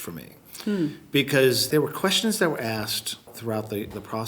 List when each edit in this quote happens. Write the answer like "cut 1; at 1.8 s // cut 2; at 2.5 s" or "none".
cut 1; at 1.6 s // cut 2; at 3.3 s